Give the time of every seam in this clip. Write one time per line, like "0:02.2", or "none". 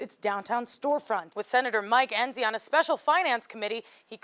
0:01.3